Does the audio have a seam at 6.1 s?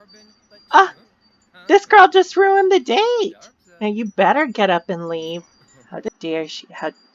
yes; 1 cut; at 6.1 s

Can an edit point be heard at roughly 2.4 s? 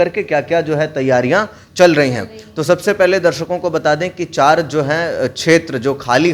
no; 0 cuts

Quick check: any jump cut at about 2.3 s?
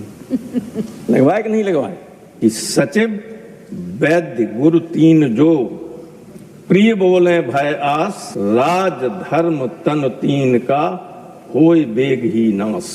yes; 1 cut; at 2.3 s

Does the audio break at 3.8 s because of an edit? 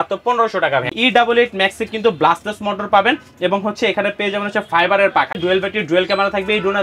no; 2 cuts; at 0.9 s, 5.4 s

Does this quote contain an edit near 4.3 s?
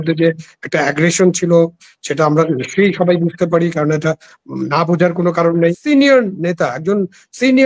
no; 1 cut; at 5.8 s

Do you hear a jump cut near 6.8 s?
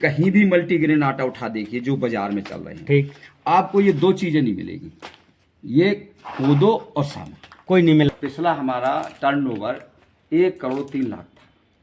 no; 1 cut; at 8.1 s

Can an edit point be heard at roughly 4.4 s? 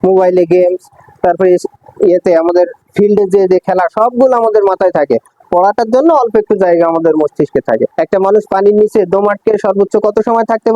no; 1 cut; at 7.9 s

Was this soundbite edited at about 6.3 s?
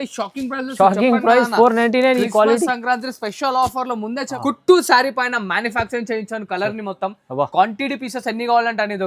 no; 1 cut; at 4.3 s

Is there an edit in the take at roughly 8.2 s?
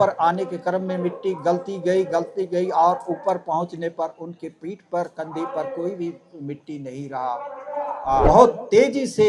yes; 1 cut; at 8.2 s

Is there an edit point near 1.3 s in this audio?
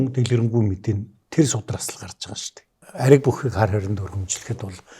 no; 1 cut; at 2.8 s

